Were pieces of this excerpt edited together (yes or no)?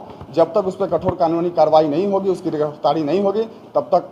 no